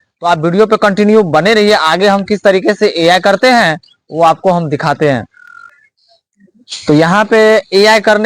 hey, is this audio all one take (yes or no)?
yes